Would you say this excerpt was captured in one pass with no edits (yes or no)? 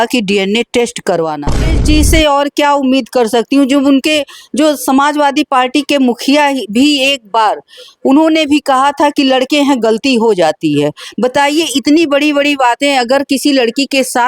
no